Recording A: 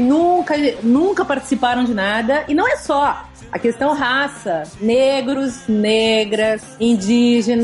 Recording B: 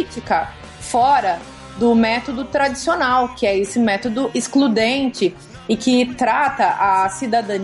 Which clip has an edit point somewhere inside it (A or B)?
A